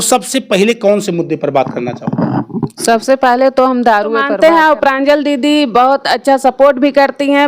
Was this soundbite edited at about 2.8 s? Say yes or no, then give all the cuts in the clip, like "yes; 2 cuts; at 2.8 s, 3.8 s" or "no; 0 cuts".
no; 1 cut; at 4.2 s